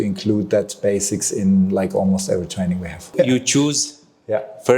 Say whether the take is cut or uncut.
cut